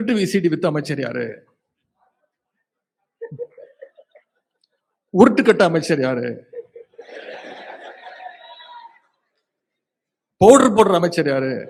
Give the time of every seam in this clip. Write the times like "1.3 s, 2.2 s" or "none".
none

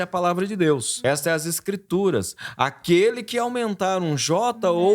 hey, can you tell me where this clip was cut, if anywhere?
0.9 s

